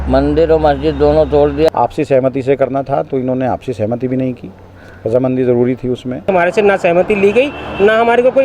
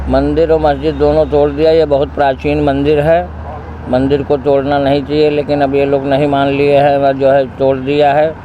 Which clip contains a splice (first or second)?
first